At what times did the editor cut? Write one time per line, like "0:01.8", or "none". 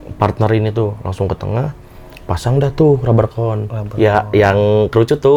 none